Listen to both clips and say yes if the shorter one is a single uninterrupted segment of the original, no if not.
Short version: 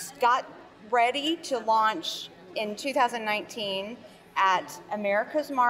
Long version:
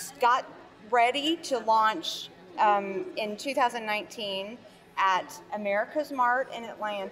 no